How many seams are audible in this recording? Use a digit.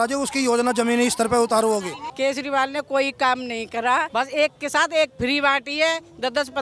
2